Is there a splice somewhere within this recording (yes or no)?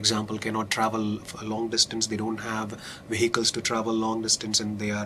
no